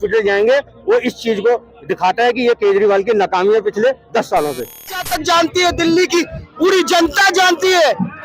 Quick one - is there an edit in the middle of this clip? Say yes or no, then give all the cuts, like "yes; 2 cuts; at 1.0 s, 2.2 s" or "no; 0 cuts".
yes; 1 cut; at 5.1 s